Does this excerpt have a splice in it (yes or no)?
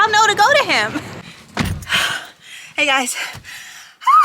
yes